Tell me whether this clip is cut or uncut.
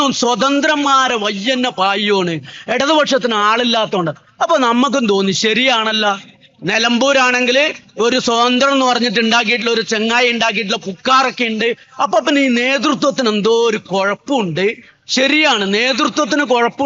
uncut